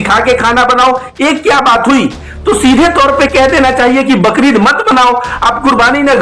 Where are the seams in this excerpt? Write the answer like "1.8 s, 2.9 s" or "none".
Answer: 2.3 s